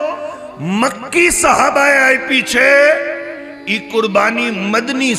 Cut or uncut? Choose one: uncut